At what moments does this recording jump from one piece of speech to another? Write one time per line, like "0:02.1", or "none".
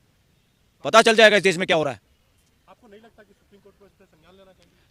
none